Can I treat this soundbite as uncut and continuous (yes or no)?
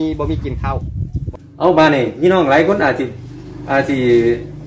no